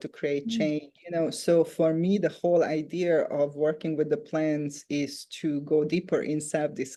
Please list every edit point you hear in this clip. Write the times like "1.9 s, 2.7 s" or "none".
none